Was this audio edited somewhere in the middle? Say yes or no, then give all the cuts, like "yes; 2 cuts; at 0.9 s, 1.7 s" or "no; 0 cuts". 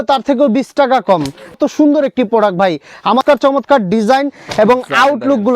yes; 2 cuts; at 1.6 s, 3.2 s